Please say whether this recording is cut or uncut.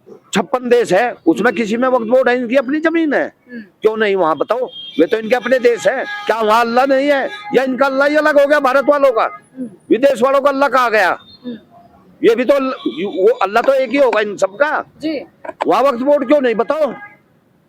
uncut